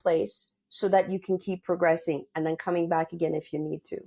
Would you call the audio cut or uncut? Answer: uncut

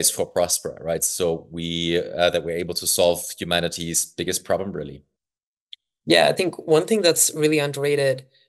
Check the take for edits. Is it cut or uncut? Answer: uncut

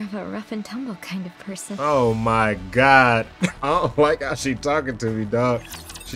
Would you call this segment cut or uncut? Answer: cut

